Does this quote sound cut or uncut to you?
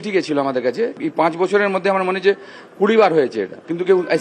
cut